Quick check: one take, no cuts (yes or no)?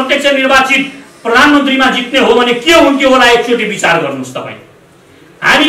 yes